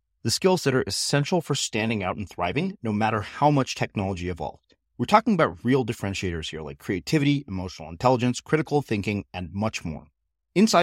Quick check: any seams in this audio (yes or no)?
no